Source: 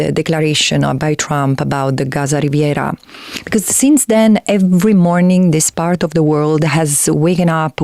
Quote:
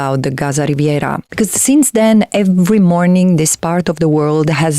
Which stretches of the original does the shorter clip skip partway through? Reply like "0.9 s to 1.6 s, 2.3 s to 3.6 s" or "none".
3.0 s to 3.4 s